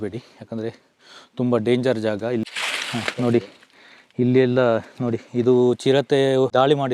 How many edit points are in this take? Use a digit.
1